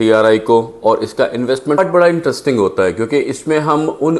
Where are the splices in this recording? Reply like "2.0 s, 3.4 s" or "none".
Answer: 1.8 s